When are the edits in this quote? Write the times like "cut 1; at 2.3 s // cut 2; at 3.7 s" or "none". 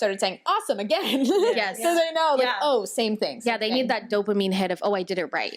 none